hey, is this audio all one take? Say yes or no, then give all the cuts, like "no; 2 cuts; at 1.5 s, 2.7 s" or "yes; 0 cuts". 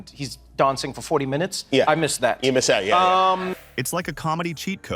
yes; 0 cuts